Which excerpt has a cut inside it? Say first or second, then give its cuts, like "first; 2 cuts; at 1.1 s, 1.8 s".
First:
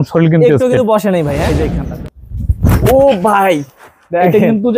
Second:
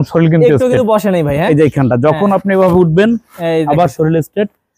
first; 1 cut; at 1.6 s